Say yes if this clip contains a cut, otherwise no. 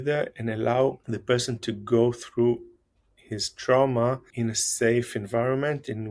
yes